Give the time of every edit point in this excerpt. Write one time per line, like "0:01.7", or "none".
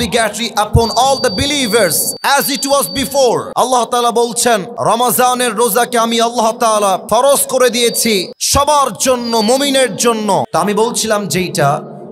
0:02.1
0:03.5
0:04.7
0:07.0
0:08.4
0:10.5